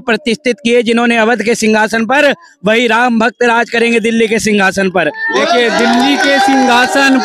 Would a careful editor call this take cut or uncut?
uncut